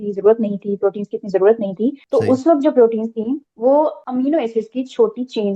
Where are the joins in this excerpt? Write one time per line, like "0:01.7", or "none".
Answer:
0:02.0
0:03.5
0:04.0